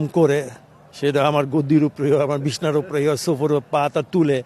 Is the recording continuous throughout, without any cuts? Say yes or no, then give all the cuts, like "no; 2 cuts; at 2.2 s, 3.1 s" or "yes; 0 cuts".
yes; 0 cuts